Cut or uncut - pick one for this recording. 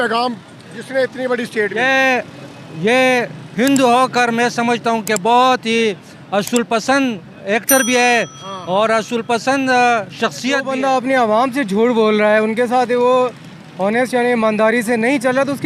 cut